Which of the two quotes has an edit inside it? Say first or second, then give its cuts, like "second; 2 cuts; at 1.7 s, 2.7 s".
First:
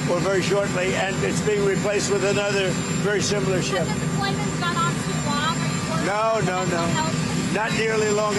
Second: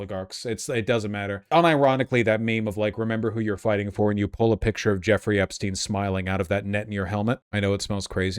second; 2 cuts; at 1.5 s, 7.5 s